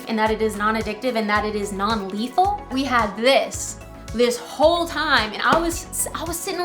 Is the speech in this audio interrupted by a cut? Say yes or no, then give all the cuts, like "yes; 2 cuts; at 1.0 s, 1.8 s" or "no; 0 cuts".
yes; 1 cut; at 2.7 s